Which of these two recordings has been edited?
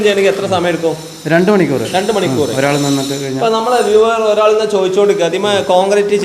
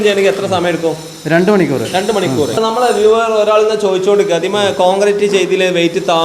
second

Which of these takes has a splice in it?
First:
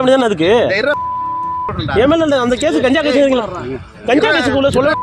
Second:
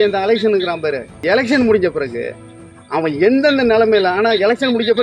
second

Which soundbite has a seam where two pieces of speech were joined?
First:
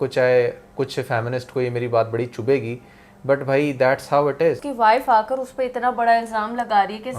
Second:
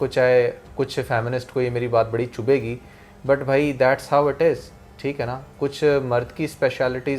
first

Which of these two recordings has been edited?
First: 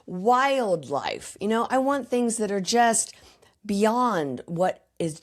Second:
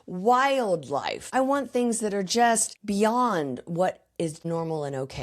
second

